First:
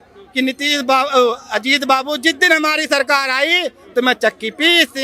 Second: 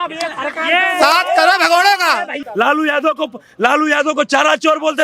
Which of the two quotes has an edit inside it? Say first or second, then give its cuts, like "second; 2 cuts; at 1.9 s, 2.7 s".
second; 1 cut; at 2.4 s